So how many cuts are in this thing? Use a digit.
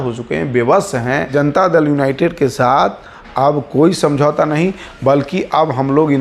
1